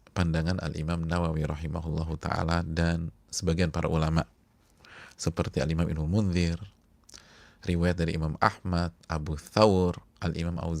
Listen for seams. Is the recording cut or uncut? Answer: uncut